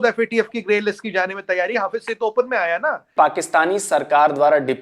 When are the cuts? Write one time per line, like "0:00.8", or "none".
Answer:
0:03.1